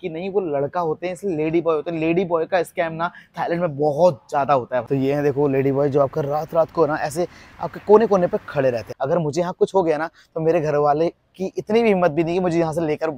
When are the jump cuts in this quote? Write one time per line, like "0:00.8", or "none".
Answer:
0:04.8
0:08.9